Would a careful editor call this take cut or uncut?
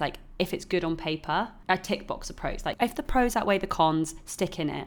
cut